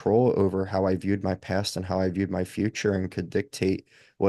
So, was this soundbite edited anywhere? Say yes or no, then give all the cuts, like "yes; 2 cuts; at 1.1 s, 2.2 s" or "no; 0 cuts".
no; 0 cuts